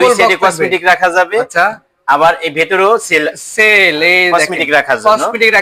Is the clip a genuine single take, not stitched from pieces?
yes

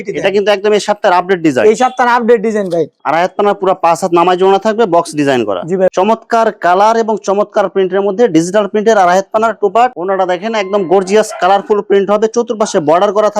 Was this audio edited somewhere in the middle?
yes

